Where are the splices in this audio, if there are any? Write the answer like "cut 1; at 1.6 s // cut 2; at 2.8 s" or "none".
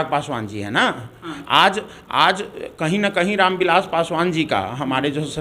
none